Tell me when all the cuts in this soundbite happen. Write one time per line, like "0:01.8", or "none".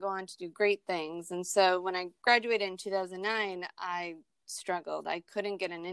none